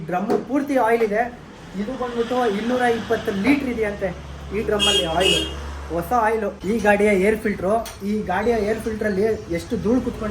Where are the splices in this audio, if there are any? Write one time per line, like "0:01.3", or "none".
0:06.6